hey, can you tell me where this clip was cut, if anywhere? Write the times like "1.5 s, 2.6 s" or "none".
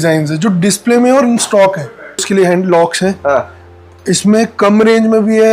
2.3 s